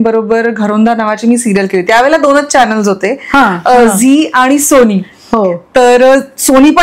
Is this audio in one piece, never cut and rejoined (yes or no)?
yes